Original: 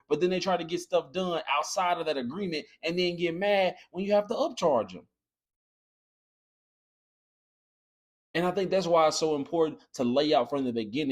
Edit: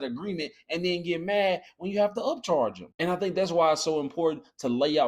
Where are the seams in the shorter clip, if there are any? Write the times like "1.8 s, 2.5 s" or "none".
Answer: 2.8 s